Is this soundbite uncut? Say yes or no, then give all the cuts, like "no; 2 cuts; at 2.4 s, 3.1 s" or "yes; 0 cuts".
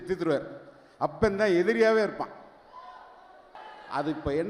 yes; 0 cuts